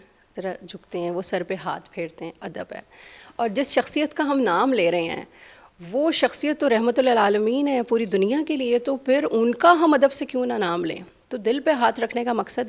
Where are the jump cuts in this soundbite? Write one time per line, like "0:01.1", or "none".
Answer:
none